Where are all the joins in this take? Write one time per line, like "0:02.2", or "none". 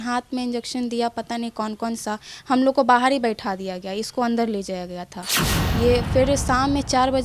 none